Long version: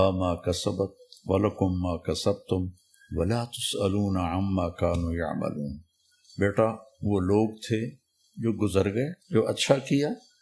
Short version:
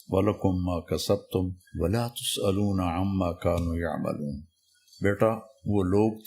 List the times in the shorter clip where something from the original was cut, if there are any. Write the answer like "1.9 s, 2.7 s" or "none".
1.6 s